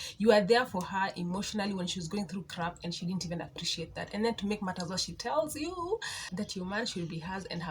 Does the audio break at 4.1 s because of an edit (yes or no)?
no